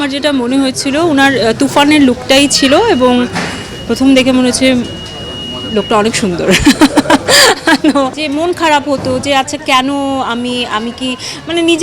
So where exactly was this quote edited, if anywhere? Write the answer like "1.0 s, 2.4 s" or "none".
8.2 s